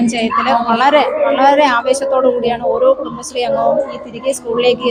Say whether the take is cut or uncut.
uncut